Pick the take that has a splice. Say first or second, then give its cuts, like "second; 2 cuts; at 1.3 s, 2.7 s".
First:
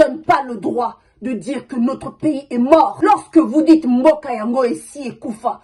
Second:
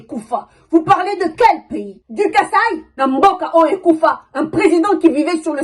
second; 1 cut; at 2.8 s